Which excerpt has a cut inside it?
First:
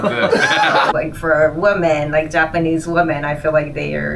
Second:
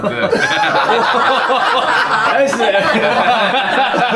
first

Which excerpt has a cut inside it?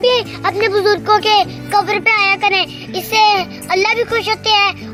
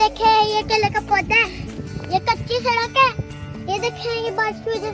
second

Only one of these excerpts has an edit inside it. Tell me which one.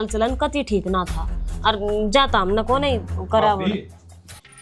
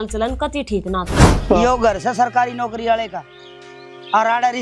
second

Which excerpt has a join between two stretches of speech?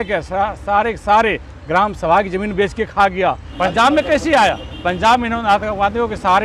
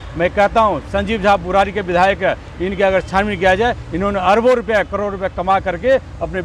first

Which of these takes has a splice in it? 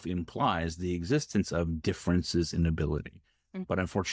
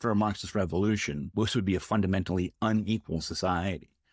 second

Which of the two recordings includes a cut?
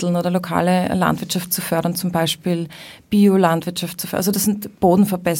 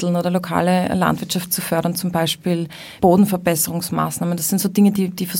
second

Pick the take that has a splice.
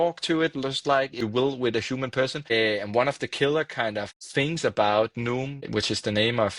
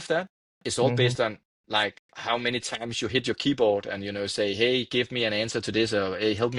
first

